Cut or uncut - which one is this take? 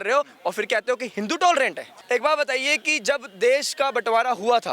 cut